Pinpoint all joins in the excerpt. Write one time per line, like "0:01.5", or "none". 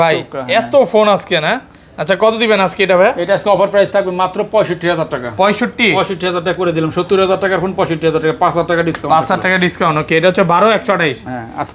none